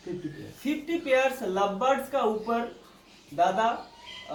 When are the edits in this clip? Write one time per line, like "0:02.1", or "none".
none